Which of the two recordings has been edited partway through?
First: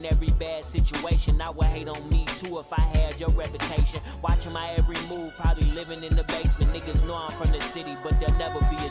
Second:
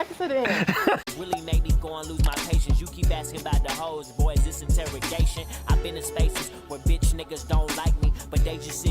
second; 1 cut; at 1.1 s

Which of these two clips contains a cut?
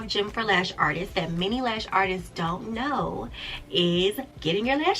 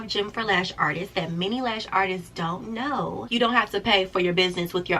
second; 1 cut; at 3.2 s

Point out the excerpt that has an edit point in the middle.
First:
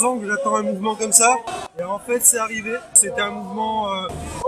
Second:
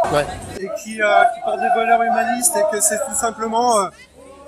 first; 2 cuts; at 1.6 s, 3.0 s

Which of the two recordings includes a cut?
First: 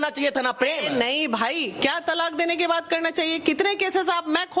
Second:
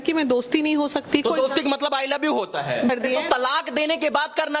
second; 1 cut; at 2.9 s

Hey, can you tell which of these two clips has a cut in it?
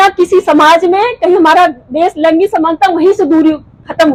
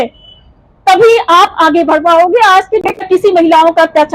second; 1 cut; at 3.0 s

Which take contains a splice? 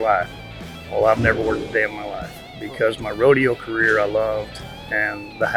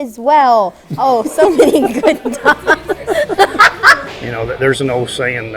second; 1 cut; at 4.1 s

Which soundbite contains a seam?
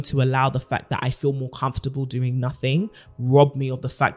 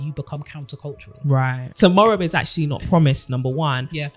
second; 1 cut; at 1.6 s

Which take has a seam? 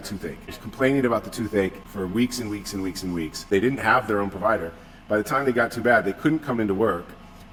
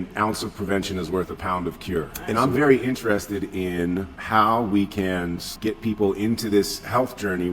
second; 3 cuts; at 2.2 s, 4.2 s, 5.5 s

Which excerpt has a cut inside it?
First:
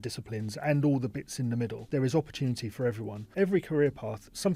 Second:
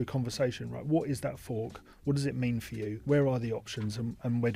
first; 2 cuts; at 1.9 s, 3.3 s

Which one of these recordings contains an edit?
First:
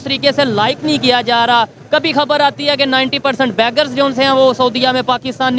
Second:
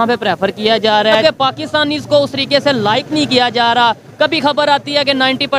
second; 1 cut; at 1.2 s

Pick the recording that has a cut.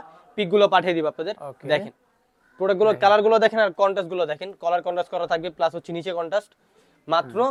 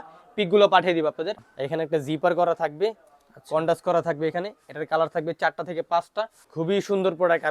second; 2 cuts; at 1.4 s, 6.4 s

